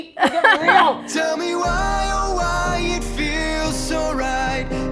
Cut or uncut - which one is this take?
cut